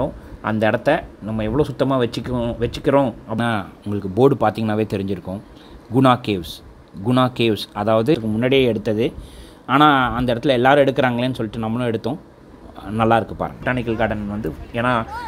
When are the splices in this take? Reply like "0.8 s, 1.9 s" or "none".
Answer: 3.4 s, 8.2 s, 13.6 s